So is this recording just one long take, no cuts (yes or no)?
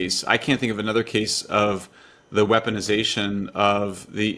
yes